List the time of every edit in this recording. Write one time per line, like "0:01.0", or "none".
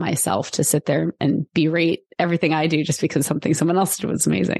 0:01.5